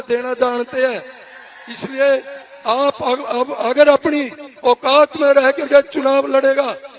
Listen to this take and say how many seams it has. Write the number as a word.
zero